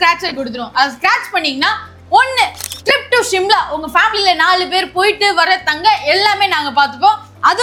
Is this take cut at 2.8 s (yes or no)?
no